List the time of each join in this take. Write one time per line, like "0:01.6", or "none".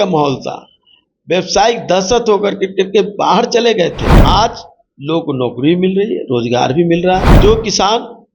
0:04.2
0:07.3